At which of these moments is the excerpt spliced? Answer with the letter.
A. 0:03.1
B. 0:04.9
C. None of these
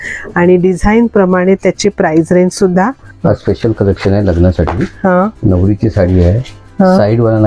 A